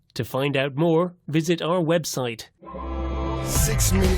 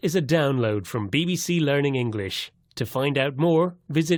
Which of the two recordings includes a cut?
first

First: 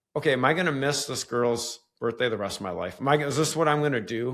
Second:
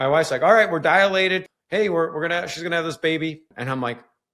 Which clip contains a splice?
second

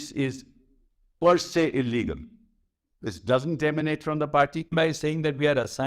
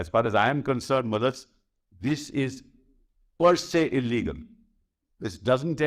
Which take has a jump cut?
first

